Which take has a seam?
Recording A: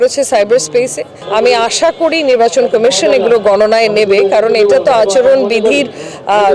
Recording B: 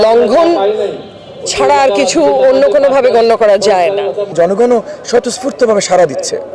B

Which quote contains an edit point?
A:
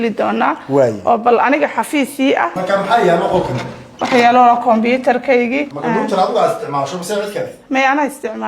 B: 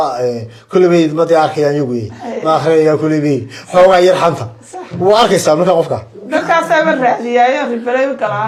A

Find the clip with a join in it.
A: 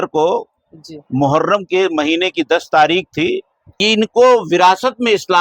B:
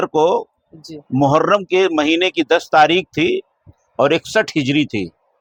A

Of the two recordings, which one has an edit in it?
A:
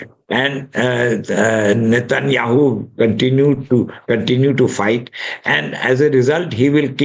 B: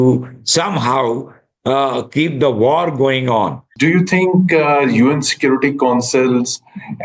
B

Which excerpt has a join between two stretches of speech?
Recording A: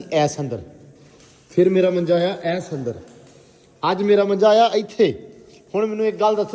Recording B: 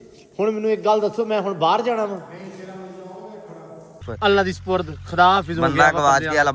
B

